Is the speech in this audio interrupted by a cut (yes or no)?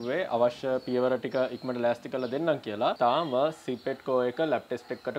yes